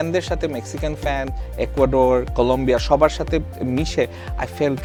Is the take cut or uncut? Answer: uncut